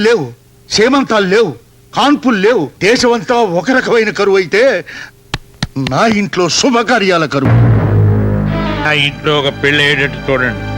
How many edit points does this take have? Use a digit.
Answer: 3